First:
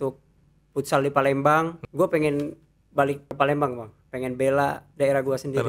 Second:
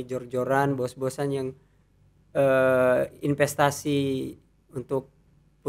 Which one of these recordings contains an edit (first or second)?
first